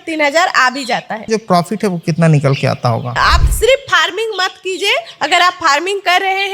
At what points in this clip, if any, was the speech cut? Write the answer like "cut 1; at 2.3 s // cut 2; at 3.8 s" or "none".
cut 1; at 1.3 s // cut 2; at 3.1 s